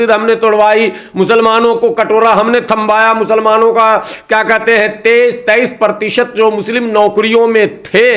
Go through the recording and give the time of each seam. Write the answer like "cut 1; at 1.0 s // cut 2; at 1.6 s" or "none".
none